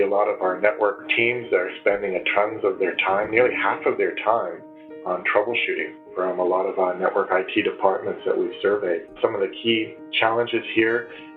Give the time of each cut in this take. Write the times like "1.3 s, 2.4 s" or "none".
1.1 s